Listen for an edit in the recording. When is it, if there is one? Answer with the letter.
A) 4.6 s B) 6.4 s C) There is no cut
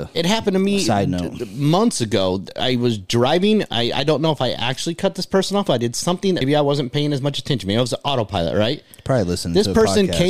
B